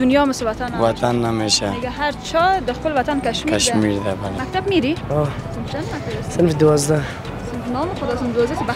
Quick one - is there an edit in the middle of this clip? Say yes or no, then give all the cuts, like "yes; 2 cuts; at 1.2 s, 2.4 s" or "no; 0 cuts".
yes; 1 cut; at 4.3 s